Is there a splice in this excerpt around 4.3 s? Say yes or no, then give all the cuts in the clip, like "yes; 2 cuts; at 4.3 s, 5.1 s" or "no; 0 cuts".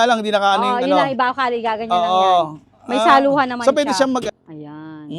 yes; 1 cut; at 4.3 s